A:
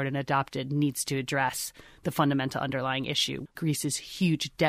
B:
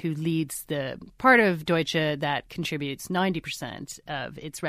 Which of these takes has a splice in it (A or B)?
A